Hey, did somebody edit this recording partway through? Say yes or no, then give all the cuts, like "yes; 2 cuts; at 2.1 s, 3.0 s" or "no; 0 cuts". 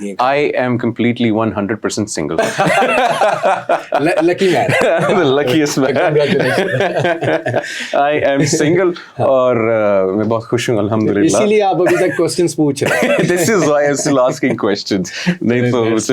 no; 0 cuts